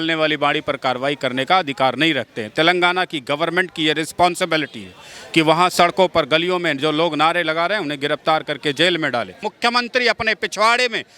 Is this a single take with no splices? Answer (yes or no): no